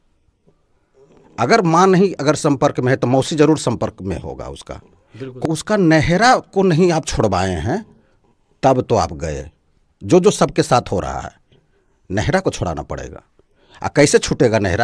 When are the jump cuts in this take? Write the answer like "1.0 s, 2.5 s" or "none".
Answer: 5.4 s